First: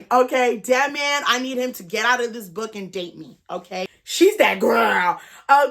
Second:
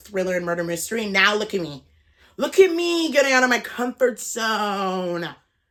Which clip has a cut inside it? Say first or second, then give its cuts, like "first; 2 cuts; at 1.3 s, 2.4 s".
first; 1 cut; at 4.0 s